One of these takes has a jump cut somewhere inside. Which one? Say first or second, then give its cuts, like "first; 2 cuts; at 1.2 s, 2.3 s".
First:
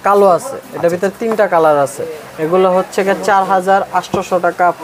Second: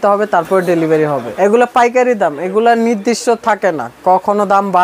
second; 1 cut; at 1.3 s